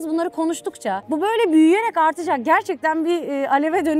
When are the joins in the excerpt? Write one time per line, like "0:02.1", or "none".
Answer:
0:01.0